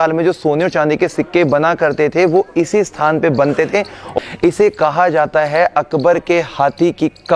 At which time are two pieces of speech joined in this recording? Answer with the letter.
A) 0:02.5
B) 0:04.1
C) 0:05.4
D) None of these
B